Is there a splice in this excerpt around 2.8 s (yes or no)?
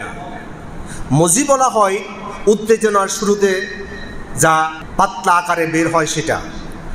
no